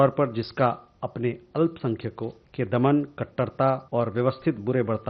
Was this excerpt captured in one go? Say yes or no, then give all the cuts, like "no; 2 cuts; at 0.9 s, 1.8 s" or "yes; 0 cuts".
no; 2 cuts; at 2.4 s, 3.8 s